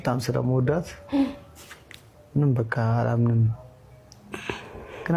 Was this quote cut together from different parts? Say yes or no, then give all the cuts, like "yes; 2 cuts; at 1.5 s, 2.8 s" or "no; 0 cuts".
no; 0 cuts